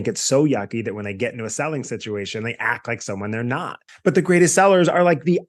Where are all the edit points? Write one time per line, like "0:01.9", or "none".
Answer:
0:03.8